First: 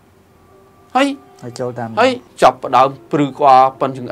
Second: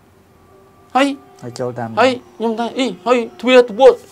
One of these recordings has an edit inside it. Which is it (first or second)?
first